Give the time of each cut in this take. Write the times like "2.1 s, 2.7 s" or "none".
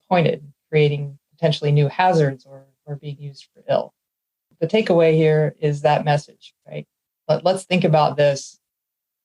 4.5 s